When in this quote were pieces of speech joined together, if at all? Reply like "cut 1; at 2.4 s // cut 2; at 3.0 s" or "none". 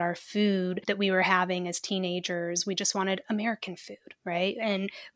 none